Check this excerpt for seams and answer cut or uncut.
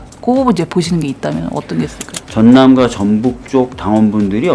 cut